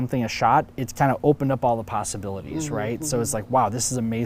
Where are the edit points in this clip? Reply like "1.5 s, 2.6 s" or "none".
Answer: none